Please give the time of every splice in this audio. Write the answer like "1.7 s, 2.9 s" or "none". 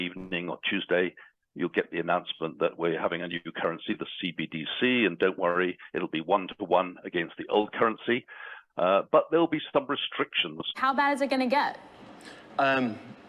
10.8 s